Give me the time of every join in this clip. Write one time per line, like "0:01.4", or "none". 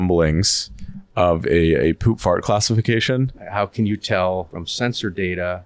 0:03.4
0:04.6